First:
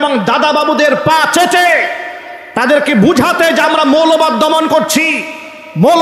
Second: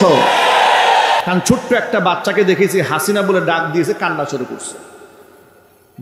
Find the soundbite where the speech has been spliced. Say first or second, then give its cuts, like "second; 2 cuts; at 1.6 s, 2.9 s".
second; 1 cut; at 1.2 s